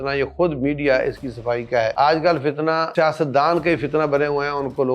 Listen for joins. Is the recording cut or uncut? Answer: cut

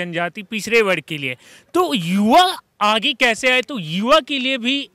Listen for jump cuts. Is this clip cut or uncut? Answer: uncut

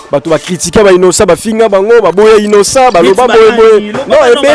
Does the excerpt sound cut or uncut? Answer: uncut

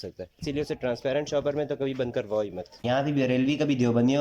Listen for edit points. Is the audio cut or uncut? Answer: cut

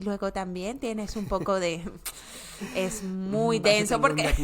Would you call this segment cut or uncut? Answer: uncut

